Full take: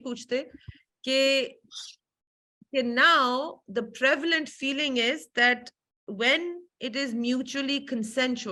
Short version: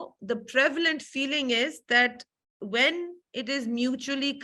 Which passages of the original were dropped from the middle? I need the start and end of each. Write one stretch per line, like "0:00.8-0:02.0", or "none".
none

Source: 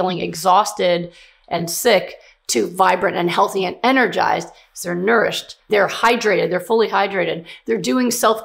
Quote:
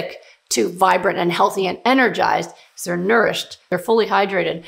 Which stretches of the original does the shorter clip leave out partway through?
0:05.7-0:06.5

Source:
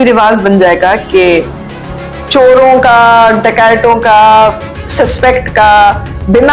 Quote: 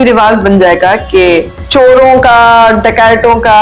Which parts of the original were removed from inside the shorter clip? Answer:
0:01.6-0:02.2

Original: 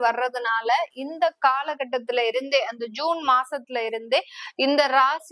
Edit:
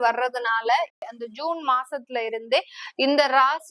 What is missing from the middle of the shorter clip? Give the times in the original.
0:01.1-0:02.7

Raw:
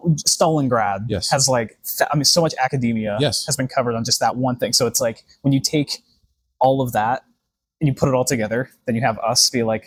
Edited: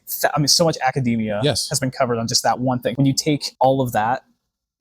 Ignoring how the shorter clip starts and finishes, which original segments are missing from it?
0:04.7-0:06.0

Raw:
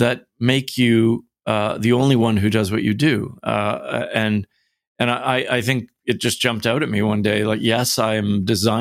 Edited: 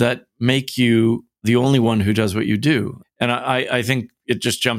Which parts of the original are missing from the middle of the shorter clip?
0:01.4-0:01.7
0:03.3-0:04.8

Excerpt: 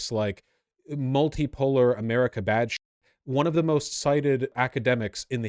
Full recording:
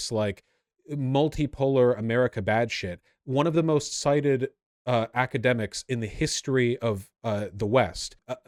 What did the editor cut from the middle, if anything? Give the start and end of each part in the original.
0:04.5-0:05.1

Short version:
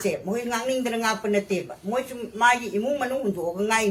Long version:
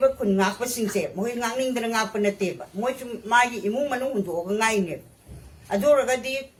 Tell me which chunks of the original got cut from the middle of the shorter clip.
none

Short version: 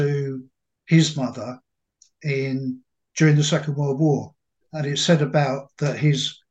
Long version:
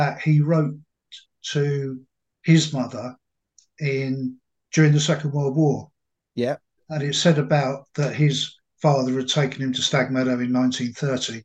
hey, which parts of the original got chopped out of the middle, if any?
0:06.1-0:06.7

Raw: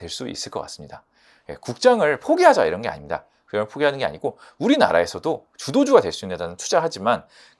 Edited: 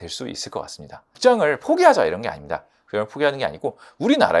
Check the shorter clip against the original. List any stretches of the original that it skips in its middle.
0:01.1-0:01.7

